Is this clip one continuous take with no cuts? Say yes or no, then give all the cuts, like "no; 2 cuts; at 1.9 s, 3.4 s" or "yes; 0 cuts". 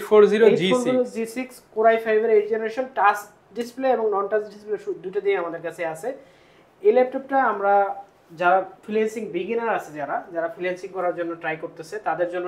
yes; 0 cuts